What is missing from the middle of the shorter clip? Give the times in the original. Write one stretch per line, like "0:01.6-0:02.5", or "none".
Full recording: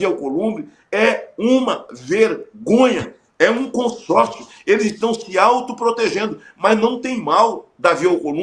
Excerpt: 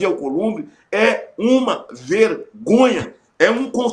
none